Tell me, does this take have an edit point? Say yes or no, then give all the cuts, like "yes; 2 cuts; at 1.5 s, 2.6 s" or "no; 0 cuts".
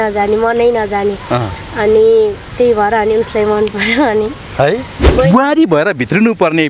yes; 1 cut; at 5.0 s